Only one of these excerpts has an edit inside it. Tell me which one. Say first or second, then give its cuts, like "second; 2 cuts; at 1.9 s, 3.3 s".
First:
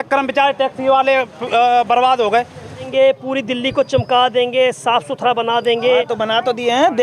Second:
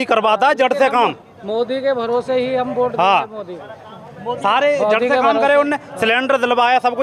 first; 1 cut; at 2.9 s